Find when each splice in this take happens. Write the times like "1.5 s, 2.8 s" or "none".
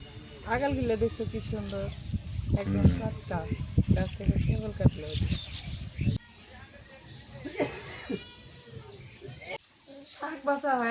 6.2 s, 9.6 s